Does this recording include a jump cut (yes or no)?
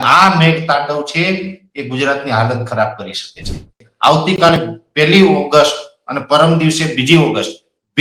yes